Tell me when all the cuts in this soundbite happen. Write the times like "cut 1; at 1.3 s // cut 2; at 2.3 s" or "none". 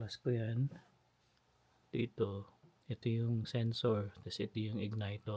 none